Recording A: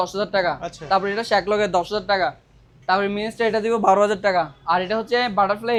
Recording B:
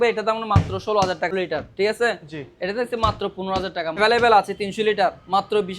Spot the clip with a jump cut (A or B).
B